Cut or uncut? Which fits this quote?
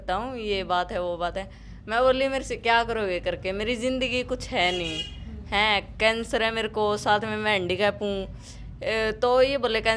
uncut